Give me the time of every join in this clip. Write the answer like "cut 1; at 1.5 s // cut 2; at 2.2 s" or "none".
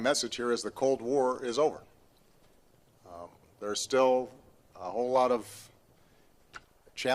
cut 1; at 1.9 s